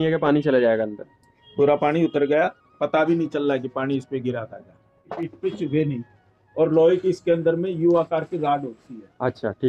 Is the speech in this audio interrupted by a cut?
yes; 1 cut; at 5.2 s

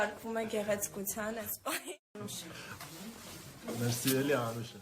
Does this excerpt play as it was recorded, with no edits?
no; 1 cut; at 2.0 s

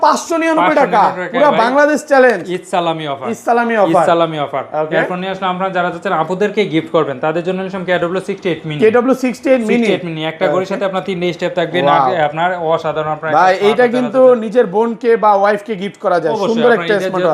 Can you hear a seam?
no; 0 cuts

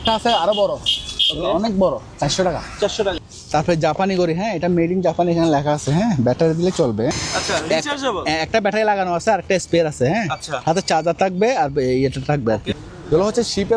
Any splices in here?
yes; 3 cuts; at 3.3 s, 7.1 s, 12.8 s

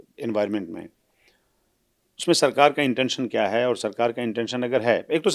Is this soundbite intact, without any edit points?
yes; 0 cuts

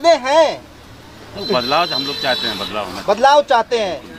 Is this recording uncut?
yes; 0 cuts

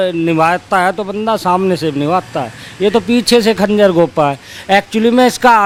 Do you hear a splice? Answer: no; 0 cuts

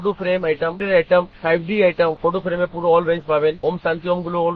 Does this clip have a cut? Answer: yes; 4 cuts; at 0.8 s, 1.3 s, 2.2 s, 3.6 s

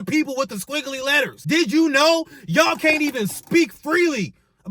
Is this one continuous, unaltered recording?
no; 1 cut; at 1.4 s

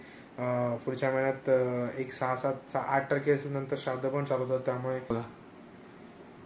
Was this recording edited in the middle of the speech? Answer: yes; 1 cut; at 5.1 s

